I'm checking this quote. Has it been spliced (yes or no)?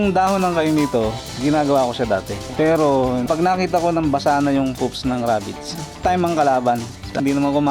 no